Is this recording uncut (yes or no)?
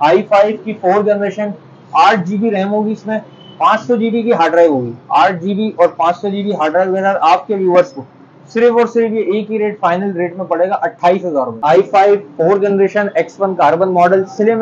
no